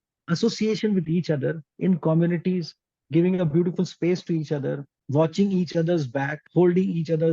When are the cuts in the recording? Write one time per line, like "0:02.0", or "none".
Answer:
0:04.9
0:06.4